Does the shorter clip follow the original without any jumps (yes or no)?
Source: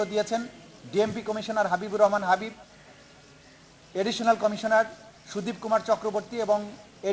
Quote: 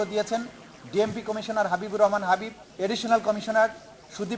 no